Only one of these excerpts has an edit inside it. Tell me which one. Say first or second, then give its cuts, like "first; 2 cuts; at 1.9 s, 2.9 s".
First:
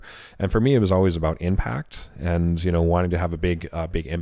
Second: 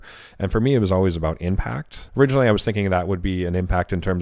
second; 1 cut; at 2.0 s